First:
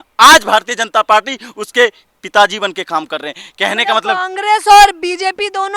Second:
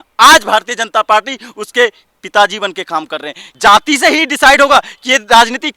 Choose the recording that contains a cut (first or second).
second